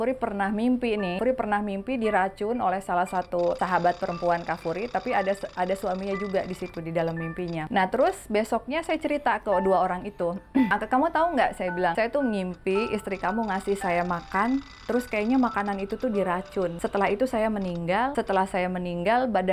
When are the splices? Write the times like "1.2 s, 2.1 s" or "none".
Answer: 1.2 s, 3.6 s, 7.6 s, 10.7 s, 11.9 s, 16.8 s, 18.1 s